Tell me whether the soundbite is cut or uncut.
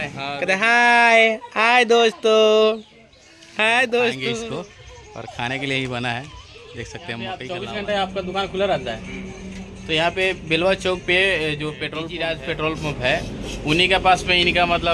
cut